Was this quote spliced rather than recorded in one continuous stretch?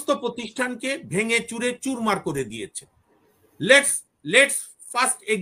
no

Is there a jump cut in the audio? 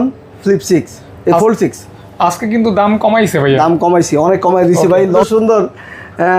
yes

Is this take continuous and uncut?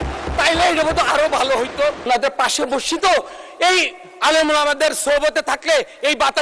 no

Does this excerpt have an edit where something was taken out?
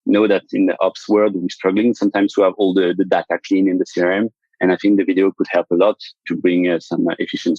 yes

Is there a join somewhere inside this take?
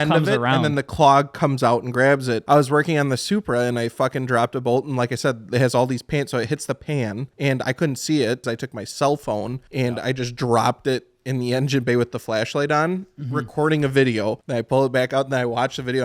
yes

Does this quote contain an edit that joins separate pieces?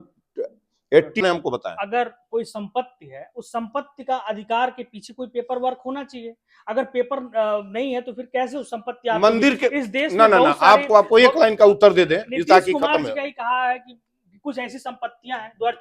yes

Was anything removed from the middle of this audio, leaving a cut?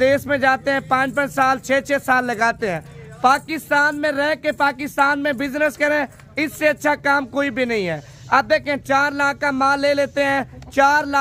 no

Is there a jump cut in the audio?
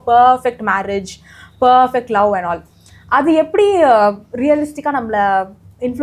no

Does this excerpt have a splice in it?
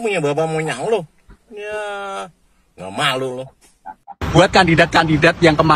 no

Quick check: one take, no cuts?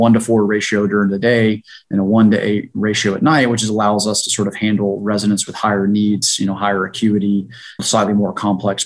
no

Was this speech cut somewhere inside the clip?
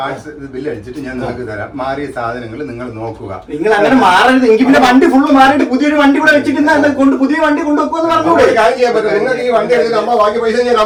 no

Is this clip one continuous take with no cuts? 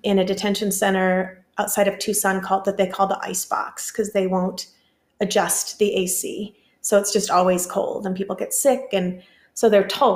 yes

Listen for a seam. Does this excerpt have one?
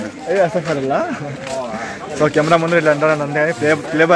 no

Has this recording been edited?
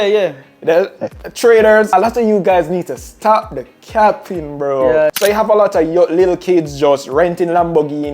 yes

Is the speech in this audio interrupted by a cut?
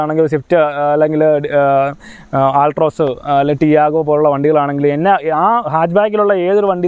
no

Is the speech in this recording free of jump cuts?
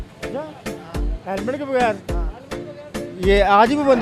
yes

